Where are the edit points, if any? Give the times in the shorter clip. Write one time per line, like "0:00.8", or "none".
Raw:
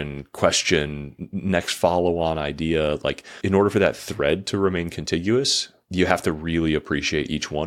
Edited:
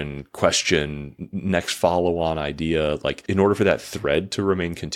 0:03.2